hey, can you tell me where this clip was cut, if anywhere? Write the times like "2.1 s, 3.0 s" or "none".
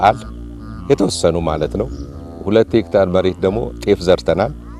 2.4 s

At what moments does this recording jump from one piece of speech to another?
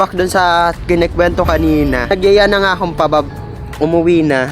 2.1 s

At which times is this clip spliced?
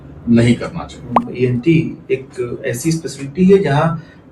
1.2 s

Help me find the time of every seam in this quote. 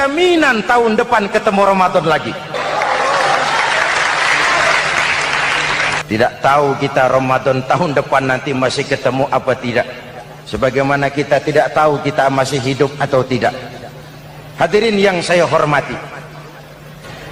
2.6 s, 6.0 s

